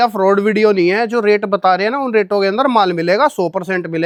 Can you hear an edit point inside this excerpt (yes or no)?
no